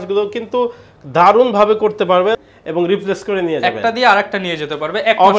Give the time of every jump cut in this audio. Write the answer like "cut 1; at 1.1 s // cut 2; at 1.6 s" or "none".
cut 1; at 2.4 s